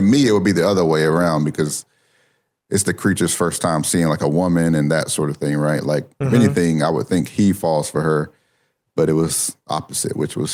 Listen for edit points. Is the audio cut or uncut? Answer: uncut